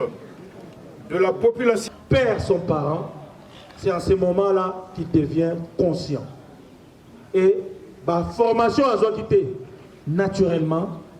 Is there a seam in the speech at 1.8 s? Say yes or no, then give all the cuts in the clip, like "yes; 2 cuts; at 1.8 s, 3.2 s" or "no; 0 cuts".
yes; 1 cut; at 1.8 s